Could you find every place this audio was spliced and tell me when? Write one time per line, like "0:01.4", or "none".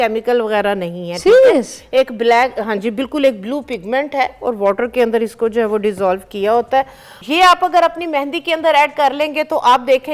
0:07.1